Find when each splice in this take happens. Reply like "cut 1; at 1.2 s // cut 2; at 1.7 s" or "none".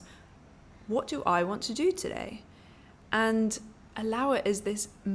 none